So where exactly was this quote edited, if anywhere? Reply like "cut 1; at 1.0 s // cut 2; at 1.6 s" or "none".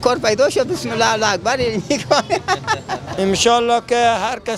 cut 1; at 3.0 s